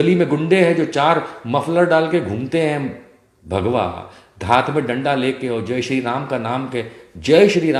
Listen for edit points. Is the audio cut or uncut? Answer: uncut